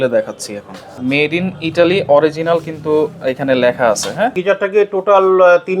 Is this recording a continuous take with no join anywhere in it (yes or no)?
no